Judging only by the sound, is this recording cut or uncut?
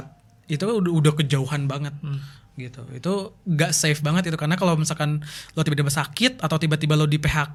uncut